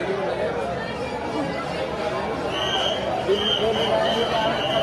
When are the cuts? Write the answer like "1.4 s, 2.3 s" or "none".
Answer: none